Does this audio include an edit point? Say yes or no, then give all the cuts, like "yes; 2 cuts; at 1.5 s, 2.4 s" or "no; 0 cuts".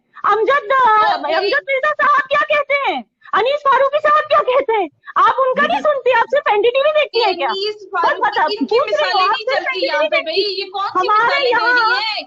no; 0 cuts